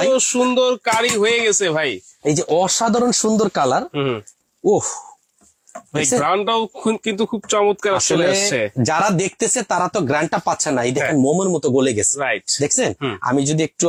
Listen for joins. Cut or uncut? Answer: uncut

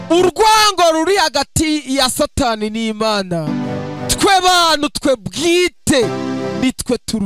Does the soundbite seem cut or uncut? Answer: uncut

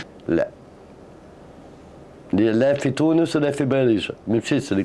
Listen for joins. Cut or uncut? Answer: uncut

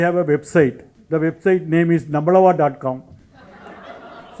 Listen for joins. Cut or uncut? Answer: cut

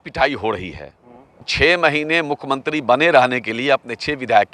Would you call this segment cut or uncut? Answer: cut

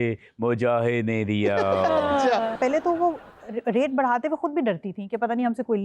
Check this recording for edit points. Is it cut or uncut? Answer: cut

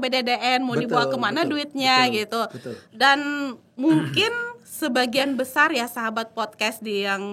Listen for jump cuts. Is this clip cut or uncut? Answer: uncut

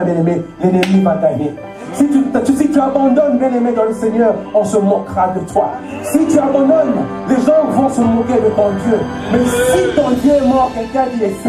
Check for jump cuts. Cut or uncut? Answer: uncut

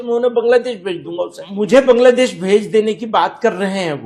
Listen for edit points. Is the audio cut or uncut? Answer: cut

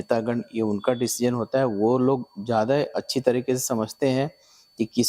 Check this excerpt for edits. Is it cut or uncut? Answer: uncut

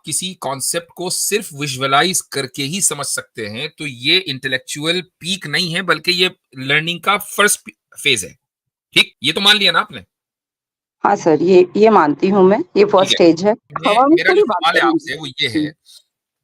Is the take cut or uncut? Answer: cut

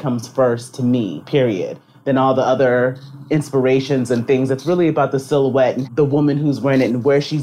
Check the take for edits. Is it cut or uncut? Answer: cut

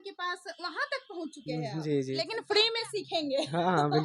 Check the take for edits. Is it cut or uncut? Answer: cut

